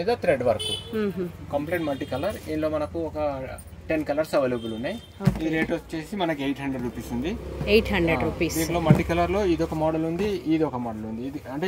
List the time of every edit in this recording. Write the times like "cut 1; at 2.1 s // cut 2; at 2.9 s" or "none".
none